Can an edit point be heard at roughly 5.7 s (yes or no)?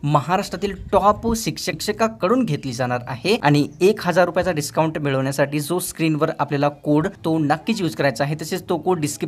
no